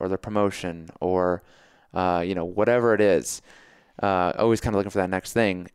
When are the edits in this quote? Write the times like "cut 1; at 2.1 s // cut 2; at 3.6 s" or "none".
none